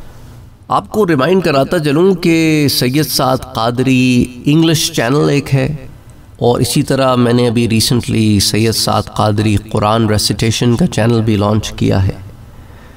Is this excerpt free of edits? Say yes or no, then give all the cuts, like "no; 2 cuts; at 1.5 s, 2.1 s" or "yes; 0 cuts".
yes; 0 cuts